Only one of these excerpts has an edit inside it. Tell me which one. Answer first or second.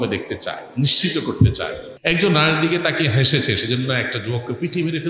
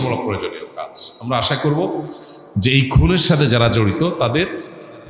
first